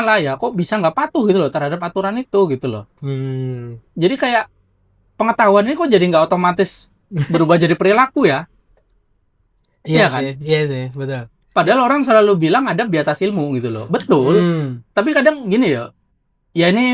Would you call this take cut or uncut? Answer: uncut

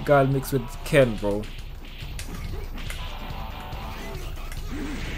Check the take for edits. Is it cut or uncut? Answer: uncut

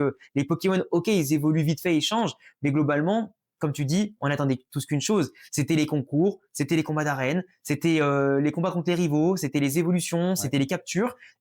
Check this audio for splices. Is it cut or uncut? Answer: uncut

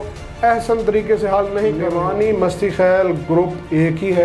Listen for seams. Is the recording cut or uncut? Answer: cut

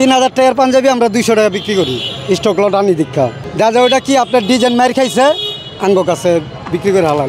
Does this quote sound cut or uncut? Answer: uncut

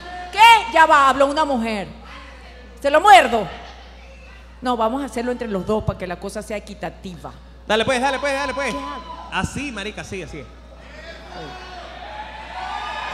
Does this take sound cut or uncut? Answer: uncut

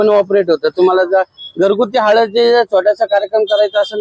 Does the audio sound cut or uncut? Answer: uncut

